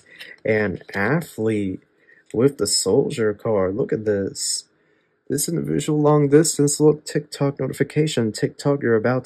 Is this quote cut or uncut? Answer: uncut